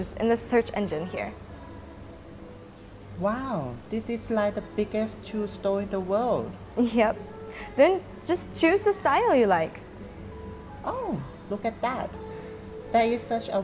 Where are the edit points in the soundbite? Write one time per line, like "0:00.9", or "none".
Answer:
0:06.5